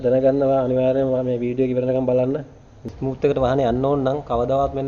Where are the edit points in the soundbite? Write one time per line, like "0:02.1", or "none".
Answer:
0:02.8